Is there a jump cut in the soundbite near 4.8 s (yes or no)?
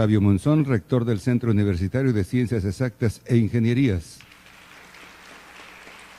no